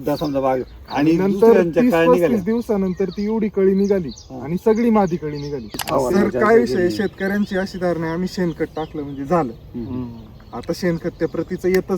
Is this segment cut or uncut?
cut